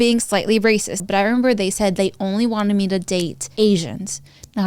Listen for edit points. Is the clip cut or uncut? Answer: cut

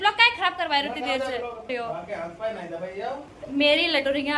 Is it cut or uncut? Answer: cut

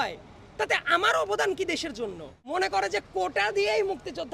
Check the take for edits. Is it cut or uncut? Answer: cut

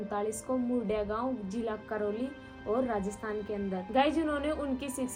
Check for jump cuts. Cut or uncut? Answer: uncut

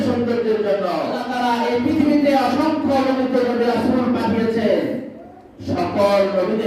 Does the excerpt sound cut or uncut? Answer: cut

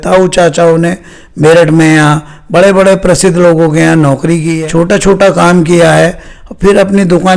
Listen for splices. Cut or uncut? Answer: cut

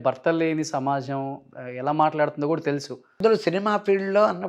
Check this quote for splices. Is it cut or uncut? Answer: cut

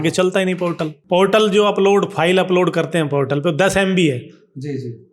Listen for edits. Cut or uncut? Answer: cut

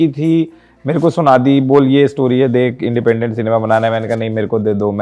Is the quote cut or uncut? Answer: uncut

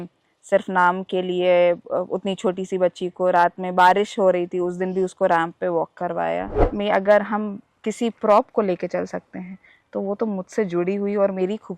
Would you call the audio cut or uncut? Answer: cut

